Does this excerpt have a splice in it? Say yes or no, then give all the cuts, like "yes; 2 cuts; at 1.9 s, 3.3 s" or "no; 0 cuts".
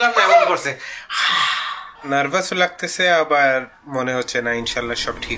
yes; 1 cut; at 1.9 s